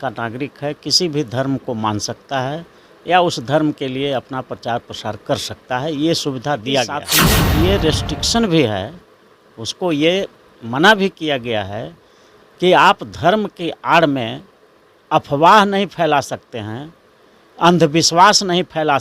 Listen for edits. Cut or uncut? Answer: cut